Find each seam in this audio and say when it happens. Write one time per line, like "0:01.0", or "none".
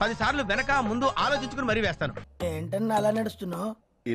0:02.2